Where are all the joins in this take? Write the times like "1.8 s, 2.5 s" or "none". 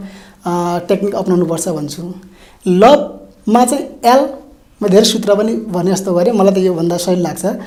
none